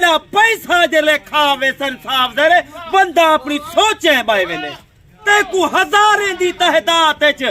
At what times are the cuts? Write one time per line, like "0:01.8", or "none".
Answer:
0:05.1

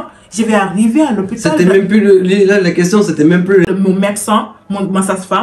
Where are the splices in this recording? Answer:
0:03.7

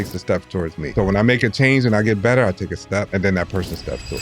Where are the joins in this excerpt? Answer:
0:00.9
0:03.1

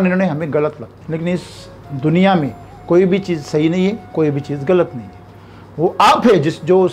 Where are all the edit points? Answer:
0:00.9

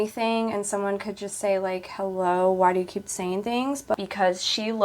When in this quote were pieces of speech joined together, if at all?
0:03.9

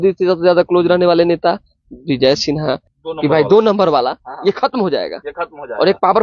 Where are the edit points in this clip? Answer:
0:02.9

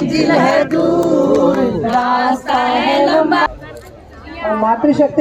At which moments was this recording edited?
0:03.5

